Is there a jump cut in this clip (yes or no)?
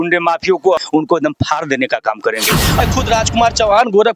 yes